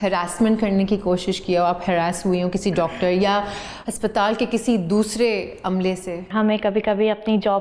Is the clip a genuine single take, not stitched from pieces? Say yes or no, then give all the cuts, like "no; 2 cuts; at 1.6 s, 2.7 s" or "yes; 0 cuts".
no; 1 cut; at 6.3 s